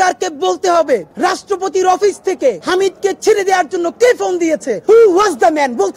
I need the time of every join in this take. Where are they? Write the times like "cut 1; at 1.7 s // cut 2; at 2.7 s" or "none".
cut 1; at 1.1 s // cut 2; at 2.6 s // cut 3; at 4.7 s

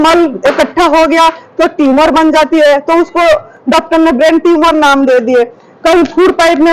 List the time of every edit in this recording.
none

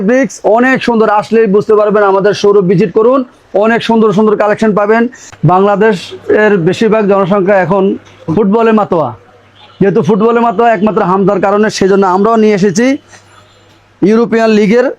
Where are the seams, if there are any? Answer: cut 1; at 5.4 s

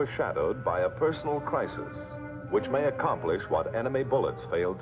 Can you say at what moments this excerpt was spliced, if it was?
none

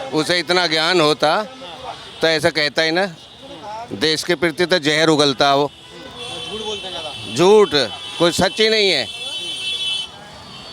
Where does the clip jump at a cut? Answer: none

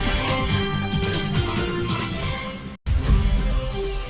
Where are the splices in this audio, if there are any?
cut 1; at 2.7 s

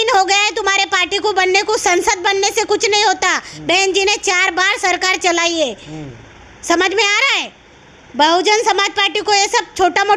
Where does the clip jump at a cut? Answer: none

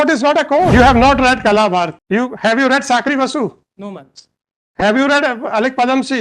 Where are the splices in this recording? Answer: cut 1; at 0.7 s // cut 2; at 2.0 s

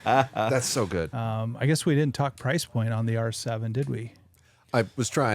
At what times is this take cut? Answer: cut 1; at 1.2 s

